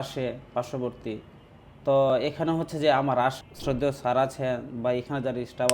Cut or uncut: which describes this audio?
cut